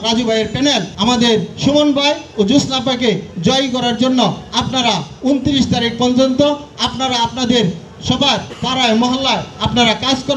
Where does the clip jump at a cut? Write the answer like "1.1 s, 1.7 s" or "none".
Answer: none